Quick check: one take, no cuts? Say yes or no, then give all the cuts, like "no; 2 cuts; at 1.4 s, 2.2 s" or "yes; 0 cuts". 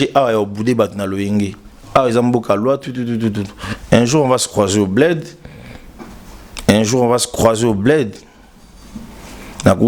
yes; 0 cuts